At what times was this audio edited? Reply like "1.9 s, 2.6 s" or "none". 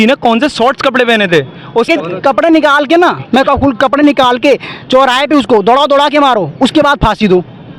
1.9 s